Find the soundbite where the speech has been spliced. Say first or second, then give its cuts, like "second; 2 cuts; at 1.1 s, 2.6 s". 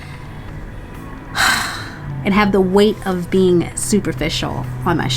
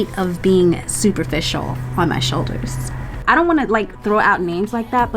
second; 1 cut; at 3.2 s